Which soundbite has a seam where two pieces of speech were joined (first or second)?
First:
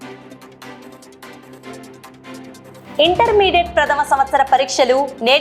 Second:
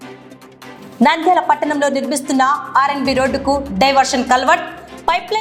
first